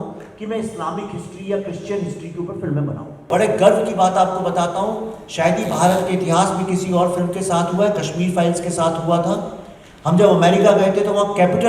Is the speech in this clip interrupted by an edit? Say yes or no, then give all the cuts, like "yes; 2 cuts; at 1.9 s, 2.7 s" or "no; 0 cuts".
yes; 1 cut; at 3.3 s